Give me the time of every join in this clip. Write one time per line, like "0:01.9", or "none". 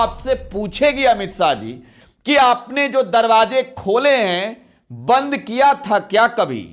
none

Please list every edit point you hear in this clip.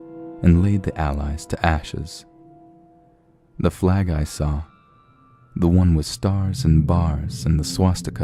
0:06.1

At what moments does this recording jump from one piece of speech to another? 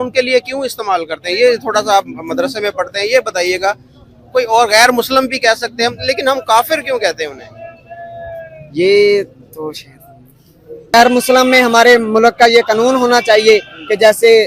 0:10.9

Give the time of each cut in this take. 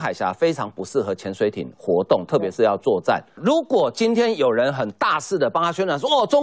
0:03.4

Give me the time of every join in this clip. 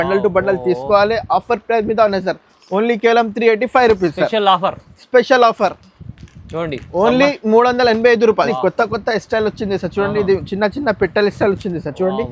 0:08.5

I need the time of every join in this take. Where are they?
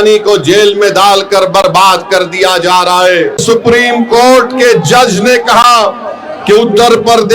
0:03.4

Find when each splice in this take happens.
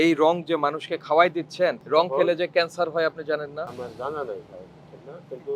0:03.7

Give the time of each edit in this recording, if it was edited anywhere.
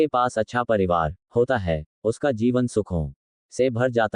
0:01.2

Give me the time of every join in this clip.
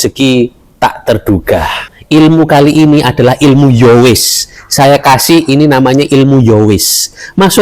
0:01.9

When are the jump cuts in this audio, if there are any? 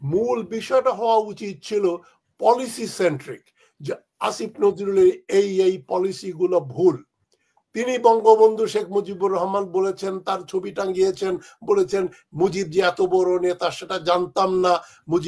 none

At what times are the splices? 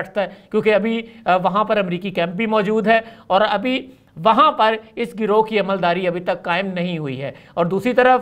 none

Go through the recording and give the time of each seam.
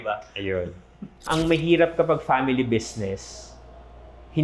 0:01.2

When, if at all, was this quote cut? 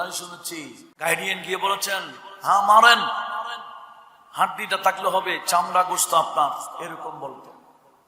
0:01.0

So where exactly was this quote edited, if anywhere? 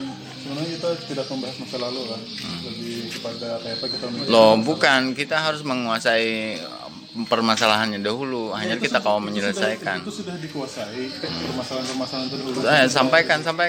none

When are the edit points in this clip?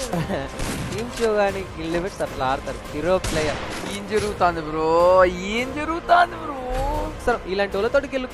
none

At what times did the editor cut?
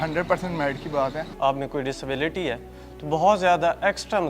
0:01.3

